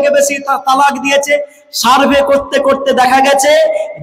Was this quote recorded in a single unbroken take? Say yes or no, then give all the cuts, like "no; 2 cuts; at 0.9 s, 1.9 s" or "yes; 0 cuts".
yes; 0 cuts